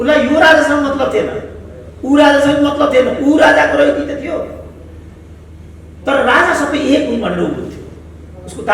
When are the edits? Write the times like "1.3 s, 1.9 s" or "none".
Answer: none